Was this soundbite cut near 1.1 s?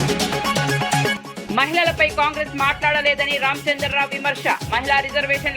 yes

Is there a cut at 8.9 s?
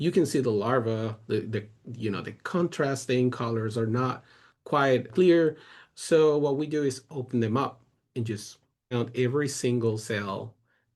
yes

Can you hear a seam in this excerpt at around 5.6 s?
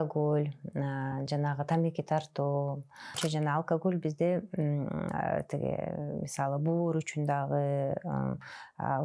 no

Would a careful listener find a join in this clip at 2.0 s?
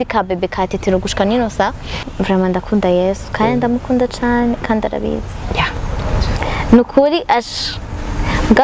yes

